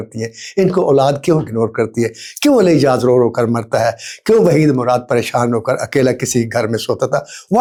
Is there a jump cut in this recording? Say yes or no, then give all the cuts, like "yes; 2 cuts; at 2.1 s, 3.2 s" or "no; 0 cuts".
no; 0 cuts